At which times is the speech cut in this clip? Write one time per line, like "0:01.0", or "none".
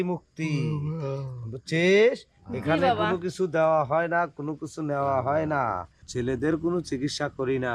0:06.0